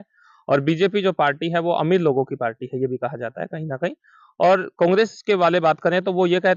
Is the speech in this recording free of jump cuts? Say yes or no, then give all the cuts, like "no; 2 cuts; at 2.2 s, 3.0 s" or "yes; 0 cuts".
yes; 0 cuts